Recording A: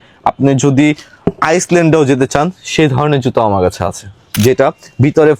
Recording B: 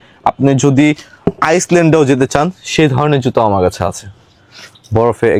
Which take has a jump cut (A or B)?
A